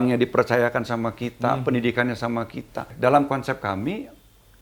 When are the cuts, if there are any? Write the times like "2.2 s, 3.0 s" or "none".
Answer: 2.9 s